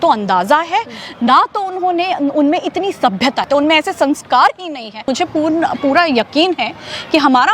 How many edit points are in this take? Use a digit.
2